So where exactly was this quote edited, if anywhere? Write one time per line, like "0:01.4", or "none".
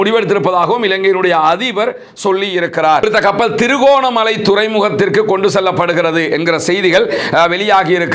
none